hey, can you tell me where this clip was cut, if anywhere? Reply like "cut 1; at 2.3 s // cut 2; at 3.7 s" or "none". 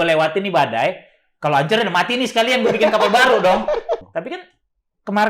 cut 1; at 4.1 s